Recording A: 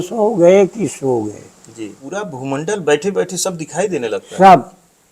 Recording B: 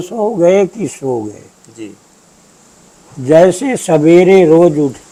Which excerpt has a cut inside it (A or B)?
A